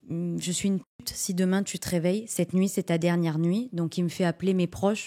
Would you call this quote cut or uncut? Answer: uncut